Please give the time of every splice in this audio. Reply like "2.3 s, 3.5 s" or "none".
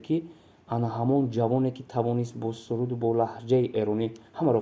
none